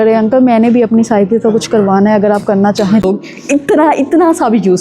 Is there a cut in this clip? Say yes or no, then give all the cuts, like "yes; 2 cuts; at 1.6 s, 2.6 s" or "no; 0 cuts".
yes; 1 cut; at 3.0 s